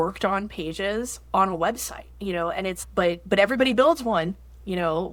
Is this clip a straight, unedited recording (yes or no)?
yes